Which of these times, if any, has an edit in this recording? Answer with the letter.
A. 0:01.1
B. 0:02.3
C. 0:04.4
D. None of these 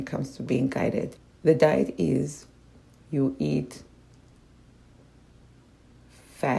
A